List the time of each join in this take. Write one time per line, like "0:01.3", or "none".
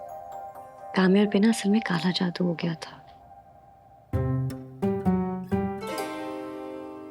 none